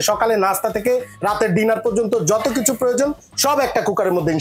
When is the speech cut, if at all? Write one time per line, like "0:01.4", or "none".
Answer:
none

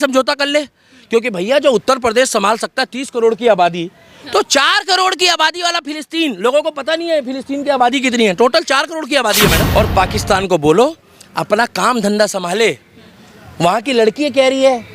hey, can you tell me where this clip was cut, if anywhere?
0:09.7

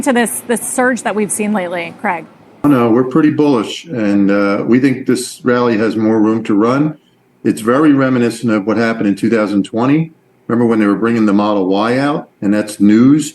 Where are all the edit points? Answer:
0:02.6

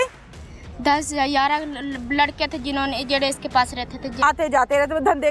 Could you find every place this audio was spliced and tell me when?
0:04.1

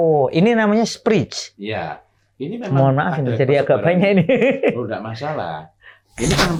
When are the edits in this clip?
none

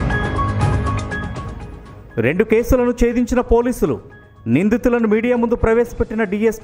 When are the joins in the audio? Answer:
0:01.2

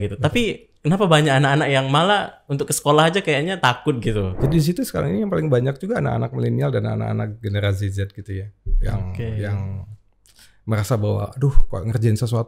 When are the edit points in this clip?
0:04.3

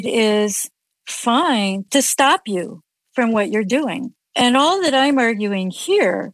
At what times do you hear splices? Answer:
0:01.8

